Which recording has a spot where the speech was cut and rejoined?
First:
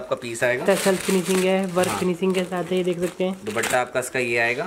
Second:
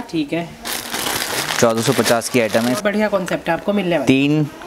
second; 1 cut; at 2.8 s

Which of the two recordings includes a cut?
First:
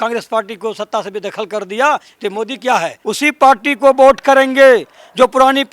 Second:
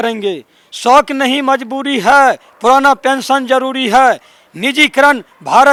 first; 1 cut; at 2.9 s

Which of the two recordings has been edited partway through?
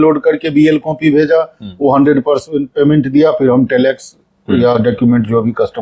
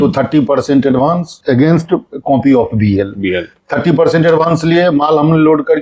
second; 2 cuts; at 1.3 s, 2.1 s

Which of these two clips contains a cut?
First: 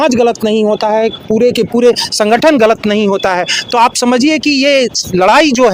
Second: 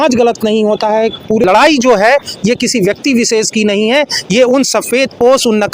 second; 1 cut; at 1.4 s

